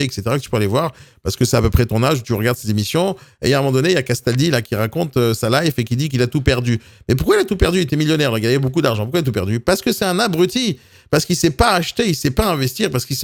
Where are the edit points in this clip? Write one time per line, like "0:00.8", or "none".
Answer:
none